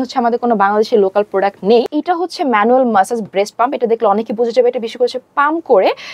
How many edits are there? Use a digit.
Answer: 1